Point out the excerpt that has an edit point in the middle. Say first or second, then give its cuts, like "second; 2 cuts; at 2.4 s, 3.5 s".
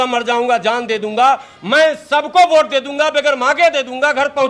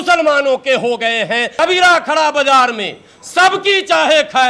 second; 1 cut; at 1.5 s